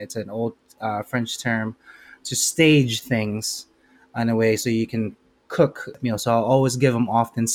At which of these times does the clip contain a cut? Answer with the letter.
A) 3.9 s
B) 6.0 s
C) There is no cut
B